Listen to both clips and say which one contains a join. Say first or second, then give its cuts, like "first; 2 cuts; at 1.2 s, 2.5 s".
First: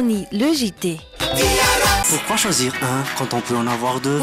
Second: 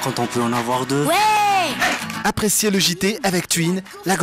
first; 1 cut; at 2.0 s